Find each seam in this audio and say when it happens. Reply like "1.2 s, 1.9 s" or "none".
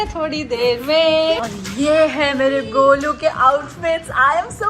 1.4 s

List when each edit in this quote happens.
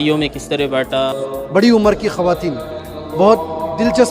1.2 s

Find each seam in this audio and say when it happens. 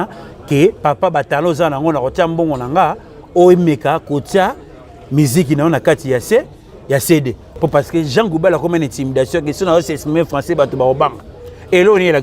7.4 s

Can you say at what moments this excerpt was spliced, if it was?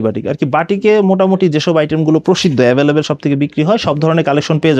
none

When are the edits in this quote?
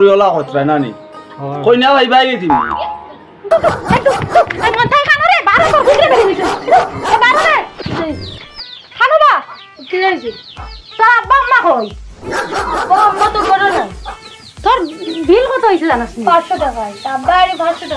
3.5 s

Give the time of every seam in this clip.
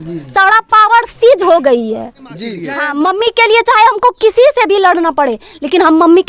2.5 s

